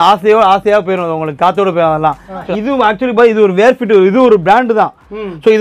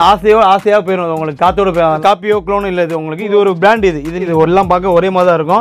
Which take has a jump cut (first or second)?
second